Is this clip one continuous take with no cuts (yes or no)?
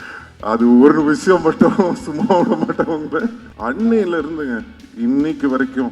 no